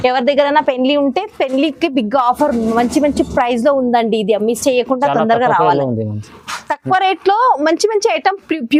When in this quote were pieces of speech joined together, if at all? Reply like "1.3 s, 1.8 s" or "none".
none